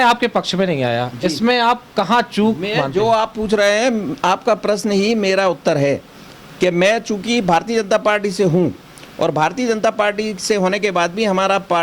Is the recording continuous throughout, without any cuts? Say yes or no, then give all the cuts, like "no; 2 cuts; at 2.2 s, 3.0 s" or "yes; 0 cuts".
yes; 0 cuts